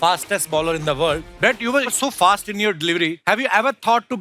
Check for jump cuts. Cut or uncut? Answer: cut